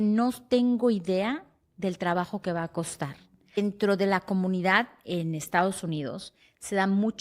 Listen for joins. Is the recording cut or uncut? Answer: cut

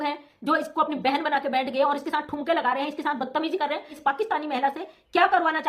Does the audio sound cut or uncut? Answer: cut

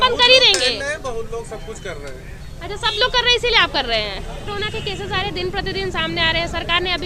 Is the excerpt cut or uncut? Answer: uncut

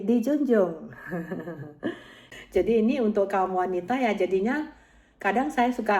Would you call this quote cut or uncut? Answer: cut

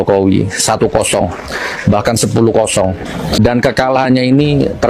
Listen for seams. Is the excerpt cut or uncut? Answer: cut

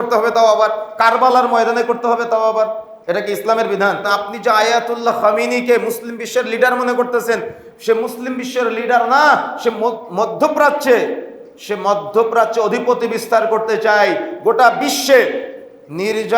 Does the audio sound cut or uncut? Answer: cut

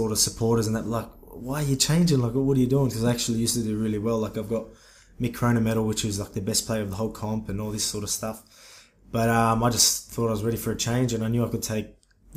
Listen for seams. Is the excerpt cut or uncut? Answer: uncut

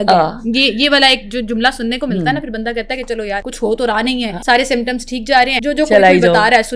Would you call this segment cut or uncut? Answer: cut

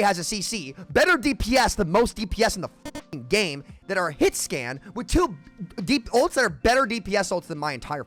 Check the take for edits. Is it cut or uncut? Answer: uncut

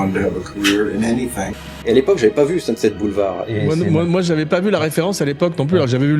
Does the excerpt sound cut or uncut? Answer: cut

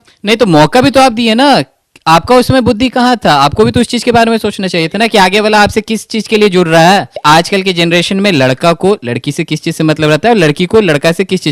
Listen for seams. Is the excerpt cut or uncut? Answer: cut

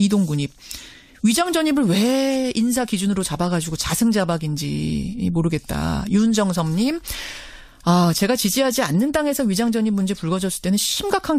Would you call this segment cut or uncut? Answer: cut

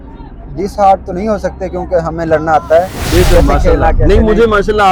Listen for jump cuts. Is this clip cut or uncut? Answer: uncut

